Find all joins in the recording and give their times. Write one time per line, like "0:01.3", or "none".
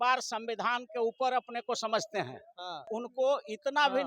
0:02.9